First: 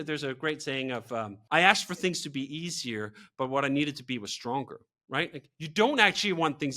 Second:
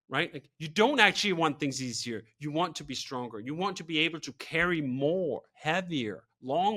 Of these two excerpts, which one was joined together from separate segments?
first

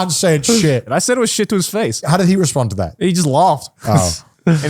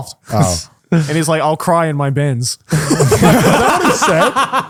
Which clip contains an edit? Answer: first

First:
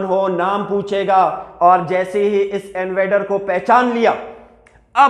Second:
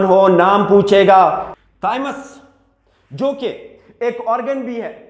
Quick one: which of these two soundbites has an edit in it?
second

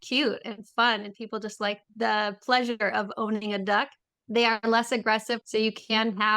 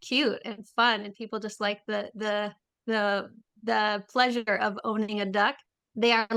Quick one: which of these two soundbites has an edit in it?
first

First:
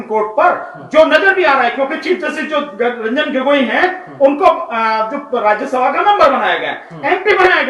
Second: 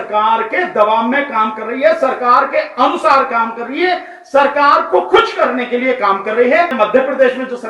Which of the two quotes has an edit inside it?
second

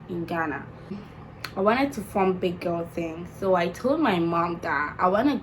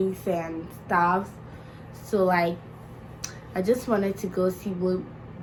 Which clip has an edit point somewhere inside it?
first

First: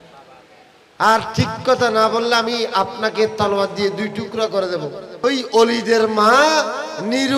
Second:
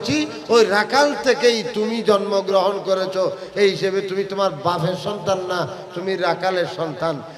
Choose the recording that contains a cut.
first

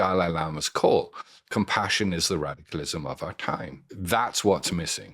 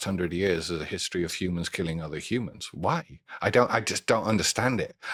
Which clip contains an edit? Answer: first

